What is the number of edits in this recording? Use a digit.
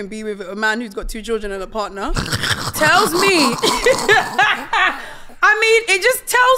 0